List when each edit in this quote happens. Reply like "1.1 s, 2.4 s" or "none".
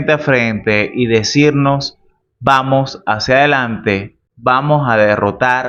none

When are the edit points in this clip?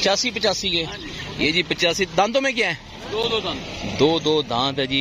none

